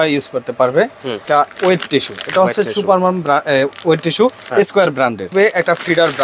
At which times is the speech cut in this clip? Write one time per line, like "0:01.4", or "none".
0:01.1
0:05.3